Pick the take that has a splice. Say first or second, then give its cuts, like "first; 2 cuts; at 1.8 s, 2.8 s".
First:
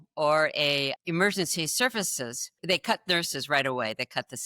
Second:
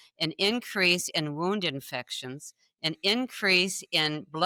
first; 2 cuts; at 1.0 s, 2.6 s